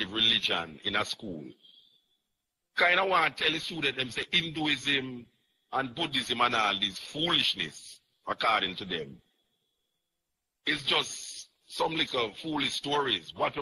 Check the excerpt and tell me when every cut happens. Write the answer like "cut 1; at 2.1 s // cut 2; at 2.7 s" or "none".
none